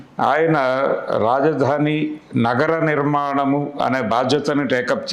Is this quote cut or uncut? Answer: uncut